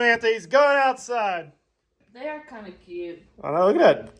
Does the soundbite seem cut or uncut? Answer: cut